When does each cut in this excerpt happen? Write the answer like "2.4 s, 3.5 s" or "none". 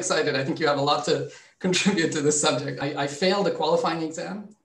2.8 s